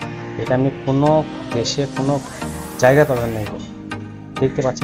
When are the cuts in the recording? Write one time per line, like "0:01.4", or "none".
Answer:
none